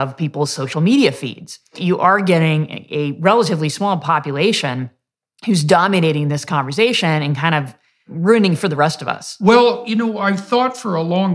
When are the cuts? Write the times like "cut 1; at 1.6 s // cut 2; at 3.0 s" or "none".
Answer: cut 1; at 1.8 s // cut 2; at 8.1 s